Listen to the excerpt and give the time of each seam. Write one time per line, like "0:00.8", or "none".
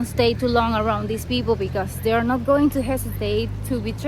none